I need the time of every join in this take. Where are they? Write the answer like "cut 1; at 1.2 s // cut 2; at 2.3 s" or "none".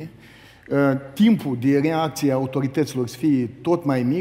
none